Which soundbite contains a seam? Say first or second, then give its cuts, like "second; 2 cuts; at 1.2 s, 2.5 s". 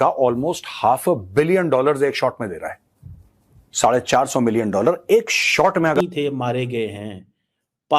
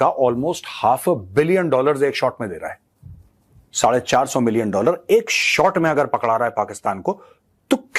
first; 1 cut; at 6.0 s